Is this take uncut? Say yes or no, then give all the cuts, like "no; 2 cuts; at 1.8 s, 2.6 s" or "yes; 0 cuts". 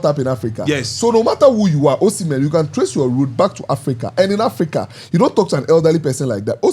yes; 0 cuts